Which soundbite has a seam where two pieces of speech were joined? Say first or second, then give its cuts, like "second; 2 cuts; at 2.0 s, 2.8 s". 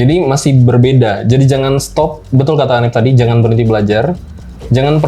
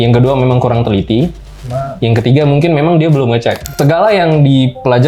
second; 1 cut; at 3.7 s